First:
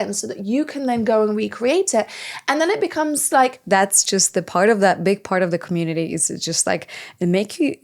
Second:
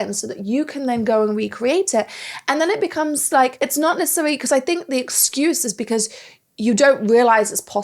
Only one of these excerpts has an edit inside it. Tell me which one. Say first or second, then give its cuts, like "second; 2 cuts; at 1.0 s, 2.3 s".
first; 1 cut; at 3.5 s